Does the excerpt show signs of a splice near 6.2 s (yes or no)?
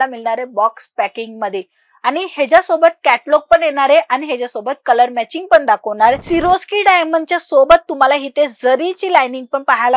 yes